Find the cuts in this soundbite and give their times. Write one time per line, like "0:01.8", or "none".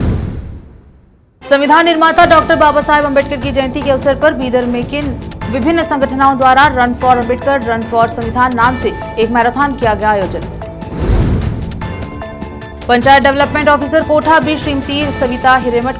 0:01.3